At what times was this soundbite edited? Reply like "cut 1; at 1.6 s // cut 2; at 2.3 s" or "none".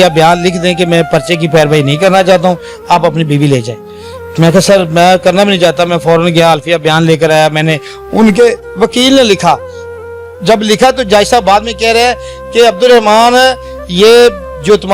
none